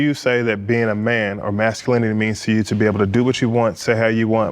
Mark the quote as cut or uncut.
uncut